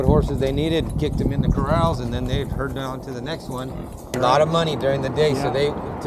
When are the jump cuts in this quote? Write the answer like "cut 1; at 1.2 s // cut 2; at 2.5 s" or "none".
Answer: cut 1; at 4.1 s

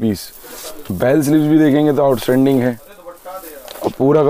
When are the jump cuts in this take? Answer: none

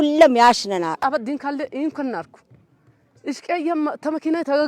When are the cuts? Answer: cut 1; at 1.0 s

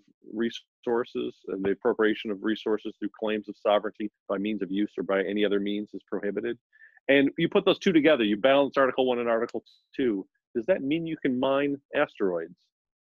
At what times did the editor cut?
none

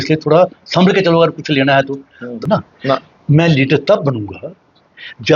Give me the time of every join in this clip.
cut 1; at 2.4 s

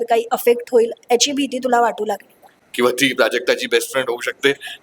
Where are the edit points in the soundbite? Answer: cut 1; at 2.6 s

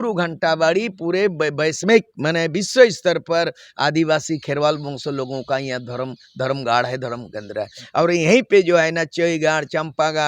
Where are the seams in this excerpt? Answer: none

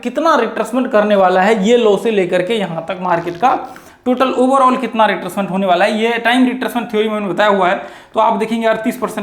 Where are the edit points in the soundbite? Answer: none

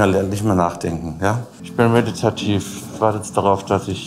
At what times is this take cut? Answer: cut 1; at 1.5 s

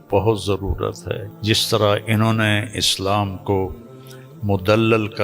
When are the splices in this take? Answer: cut 1; at 1.3 s

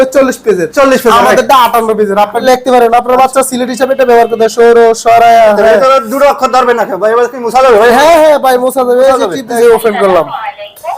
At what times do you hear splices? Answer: cut 1; at 2.4 s // cut 2; at 9.5 s

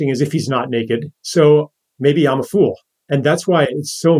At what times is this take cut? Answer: cut 1; at 2.9 s

